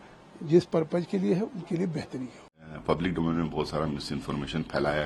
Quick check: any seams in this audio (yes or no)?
yes